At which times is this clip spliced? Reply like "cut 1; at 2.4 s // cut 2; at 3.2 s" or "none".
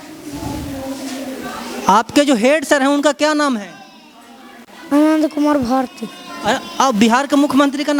none